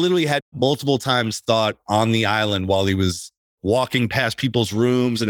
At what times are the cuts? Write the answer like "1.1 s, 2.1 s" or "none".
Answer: none